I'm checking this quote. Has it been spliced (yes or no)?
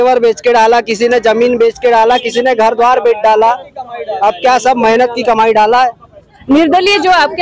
yes